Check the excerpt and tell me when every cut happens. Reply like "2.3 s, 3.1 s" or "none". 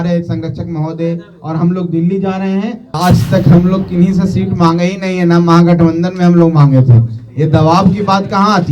2.9 s